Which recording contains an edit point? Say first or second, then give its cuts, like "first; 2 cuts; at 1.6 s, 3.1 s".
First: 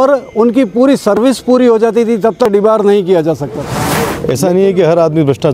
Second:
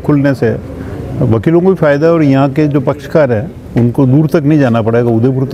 first; 1 cut; at 4.1 s